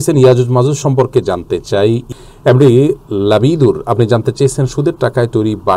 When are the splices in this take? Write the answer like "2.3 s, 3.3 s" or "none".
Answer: 2.0 s